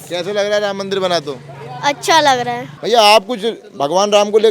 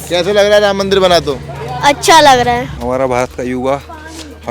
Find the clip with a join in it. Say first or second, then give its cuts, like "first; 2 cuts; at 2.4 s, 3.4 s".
second; 1 cut; at 2.7 s